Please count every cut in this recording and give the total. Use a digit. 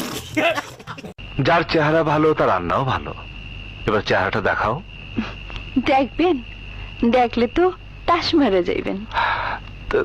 1